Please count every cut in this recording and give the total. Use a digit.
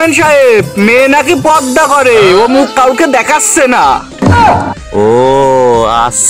0